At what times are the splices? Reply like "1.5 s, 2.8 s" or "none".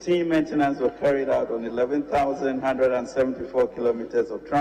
none